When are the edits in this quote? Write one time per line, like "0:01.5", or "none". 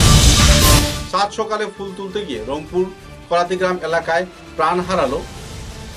0:00.9